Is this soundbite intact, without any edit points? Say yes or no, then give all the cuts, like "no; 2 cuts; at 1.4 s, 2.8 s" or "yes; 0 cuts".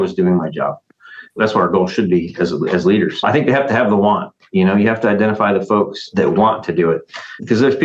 no; 3 cuts; at 1.4 s, 3.2 s, 6.0 s